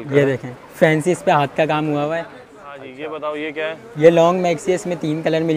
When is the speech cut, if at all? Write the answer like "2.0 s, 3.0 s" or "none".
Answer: 2.9 s